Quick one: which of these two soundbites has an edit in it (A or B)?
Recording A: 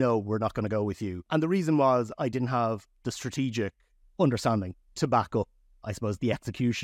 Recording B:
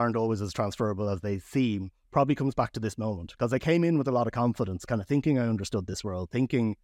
A